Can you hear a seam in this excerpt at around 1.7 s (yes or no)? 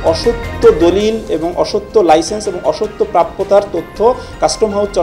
no